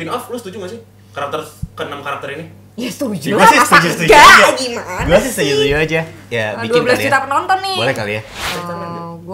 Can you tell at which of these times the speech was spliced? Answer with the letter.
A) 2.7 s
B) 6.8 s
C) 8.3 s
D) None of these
C